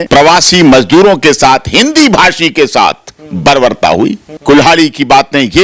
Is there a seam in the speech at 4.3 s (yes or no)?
yes